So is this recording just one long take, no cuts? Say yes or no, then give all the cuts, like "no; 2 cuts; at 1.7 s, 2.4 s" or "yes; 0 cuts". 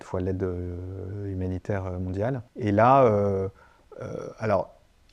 no; 1 cut; at 2.5 s